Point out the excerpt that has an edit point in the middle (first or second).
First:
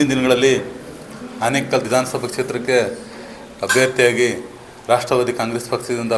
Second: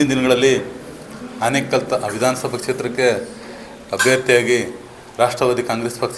first